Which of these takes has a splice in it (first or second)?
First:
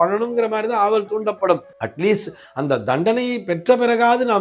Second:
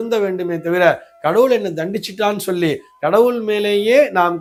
first